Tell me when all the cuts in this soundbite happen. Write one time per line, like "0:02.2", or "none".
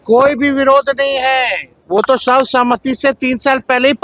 none